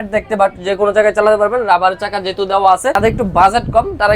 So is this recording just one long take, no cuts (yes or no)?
no